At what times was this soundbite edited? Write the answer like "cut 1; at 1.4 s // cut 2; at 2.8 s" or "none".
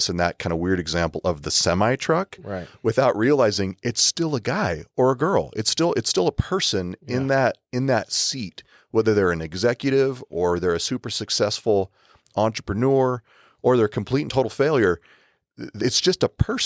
none